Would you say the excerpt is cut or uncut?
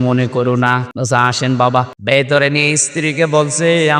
cut